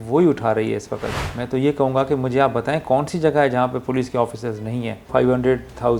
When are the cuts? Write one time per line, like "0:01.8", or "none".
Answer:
0:01.2
0:05.1